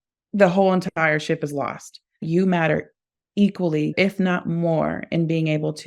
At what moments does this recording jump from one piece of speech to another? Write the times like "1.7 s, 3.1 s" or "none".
2.2 s, 3.9 s